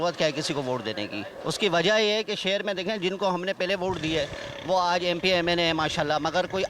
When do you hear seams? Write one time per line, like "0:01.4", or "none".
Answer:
0:01.3